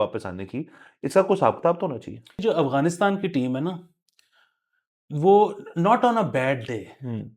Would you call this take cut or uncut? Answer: cut